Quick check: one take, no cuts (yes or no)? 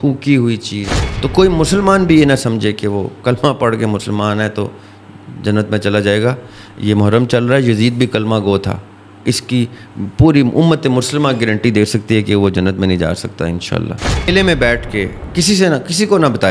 no